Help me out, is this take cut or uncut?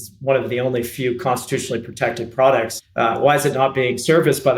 cut